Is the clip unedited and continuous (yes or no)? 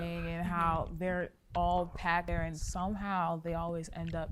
no